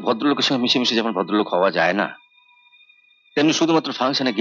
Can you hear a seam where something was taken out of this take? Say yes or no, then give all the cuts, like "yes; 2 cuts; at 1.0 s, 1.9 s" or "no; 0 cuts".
no; 0 cuts